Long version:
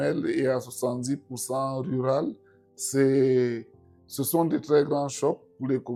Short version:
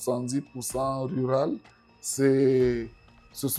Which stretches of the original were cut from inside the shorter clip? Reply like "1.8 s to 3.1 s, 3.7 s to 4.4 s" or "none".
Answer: none